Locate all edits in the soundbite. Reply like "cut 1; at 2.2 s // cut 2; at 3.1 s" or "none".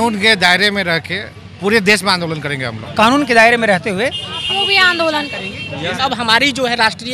cut 1; at 2.9 s // cut 2; at 6.0 s